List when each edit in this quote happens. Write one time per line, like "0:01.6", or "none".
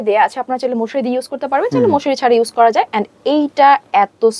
none